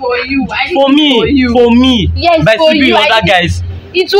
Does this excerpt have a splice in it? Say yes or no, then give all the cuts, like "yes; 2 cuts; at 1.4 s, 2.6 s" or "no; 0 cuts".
no; 0 cuts